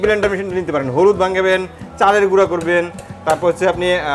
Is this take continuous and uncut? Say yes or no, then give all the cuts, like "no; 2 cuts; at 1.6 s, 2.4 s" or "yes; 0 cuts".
yes; 0 cuts